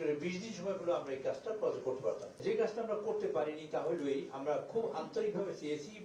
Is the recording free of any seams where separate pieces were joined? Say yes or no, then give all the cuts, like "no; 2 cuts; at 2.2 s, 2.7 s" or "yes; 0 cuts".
yes; 0 cuts